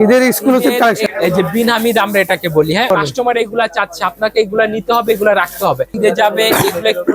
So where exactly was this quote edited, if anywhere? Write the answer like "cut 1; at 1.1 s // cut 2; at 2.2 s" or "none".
cut 1; at 1.0 s // cut 2; at 2.9 s // cut 3; at 5.9 s

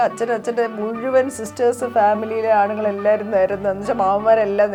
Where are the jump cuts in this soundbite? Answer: none

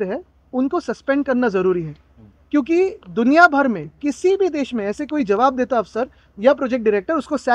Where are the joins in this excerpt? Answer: none

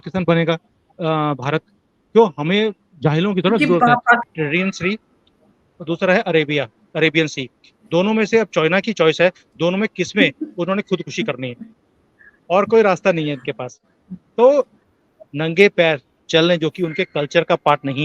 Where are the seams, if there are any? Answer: cut 1; at 4.3 s // cut 2; at 14.9 s

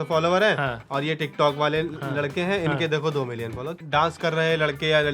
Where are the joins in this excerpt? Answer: cut 1; at 3.8 s

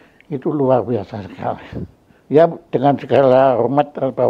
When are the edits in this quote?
none

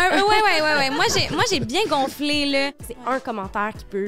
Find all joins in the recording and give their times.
cut 1; at 2.8 s

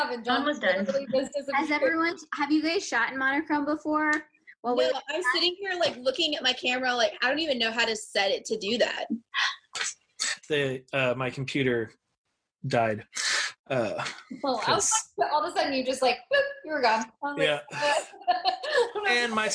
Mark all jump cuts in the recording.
cut 1; at 9.7 s

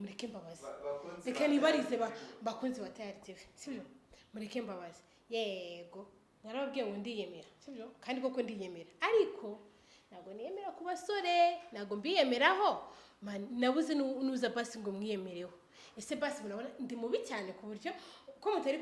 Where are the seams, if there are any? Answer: none

